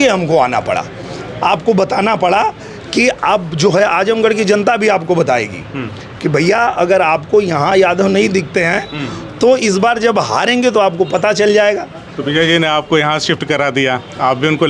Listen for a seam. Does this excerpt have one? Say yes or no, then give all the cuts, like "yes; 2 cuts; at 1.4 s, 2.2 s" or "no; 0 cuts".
no; 0 cuts